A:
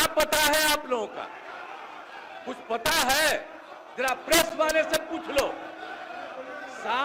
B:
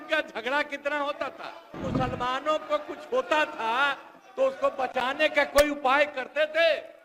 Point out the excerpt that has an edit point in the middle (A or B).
B